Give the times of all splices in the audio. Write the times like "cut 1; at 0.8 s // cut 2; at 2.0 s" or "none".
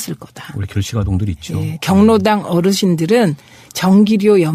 none